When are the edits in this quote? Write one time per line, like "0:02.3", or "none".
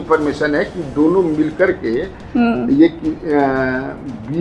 none